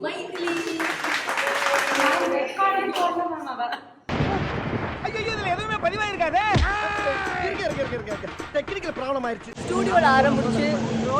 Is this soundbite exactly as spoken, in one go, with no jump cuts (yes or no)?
no